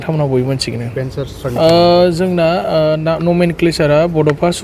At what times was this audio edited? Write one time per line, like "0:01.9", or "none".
0:01.2